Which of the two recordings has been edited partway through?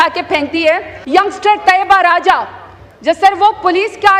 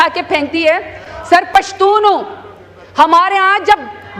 first; 1 cut; at 0.9 s

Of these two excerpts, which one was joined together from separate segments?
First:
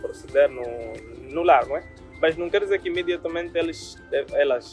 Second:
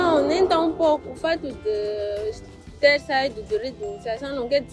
second; 1 cut; at 1.1 s

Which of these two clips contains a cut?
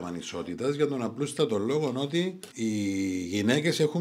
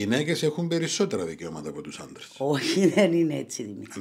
first; 1 cut; at 2.4 s

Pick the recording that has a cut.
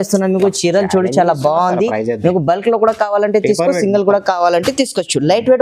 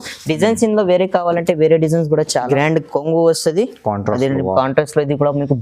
second; 1 cut; at 2.5 s

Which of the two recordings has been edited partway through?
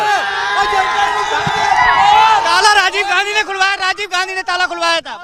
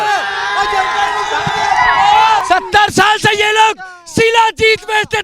second; 1 cut; at 2.4 s

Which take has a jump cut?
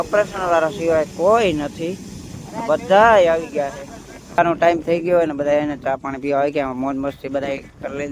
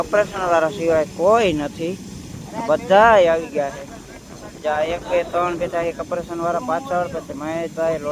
first; 1 cut; at 4.4 s

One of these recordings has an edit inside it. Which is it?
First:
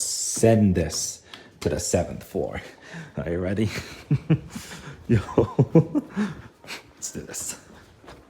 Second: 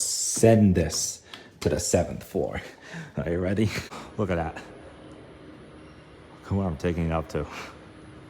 second; 1 cut; at 3.9 s

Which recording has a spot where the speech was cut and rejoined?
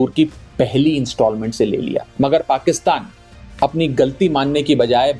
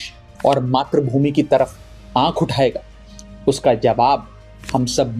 first; 1 cut; at 2.1 s

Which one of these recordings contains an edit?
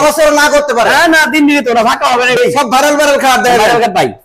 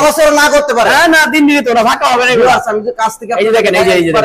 first; 1 cut; at 2.4 s

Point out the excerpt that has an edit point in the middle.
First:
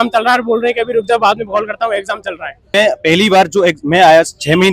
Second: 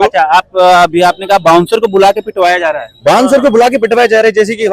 first; 1 cut; at 2.7 s

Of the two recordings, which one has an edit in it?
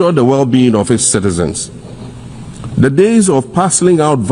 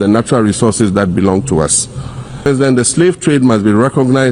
second; 1 cut; at 2.5 s

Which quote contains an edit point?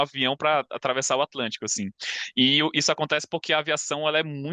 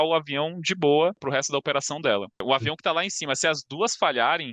second; 2 cuts; at 1.2 s, 2.4 s

